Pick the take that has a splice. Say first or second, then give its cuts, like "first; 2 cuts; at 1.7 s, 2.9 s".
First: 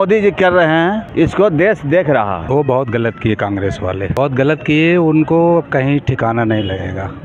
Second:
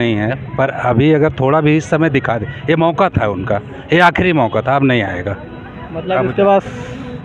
first; 3 cuts; at 1.0 s, 2.4 s, 4.1 s